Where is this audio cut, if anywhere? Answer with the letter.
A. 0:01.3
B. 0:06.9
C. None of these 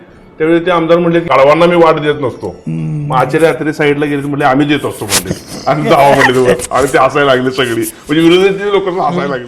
A